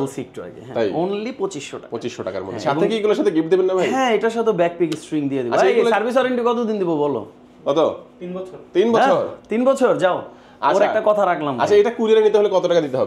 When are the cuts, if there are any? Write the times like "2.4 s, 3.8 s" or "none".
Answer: none